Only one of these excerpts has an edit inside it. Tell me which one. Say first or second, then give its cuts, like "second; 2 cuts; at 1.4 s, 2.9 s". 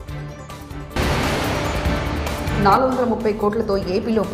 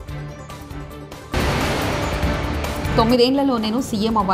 first; 1 cut; at 0.9 s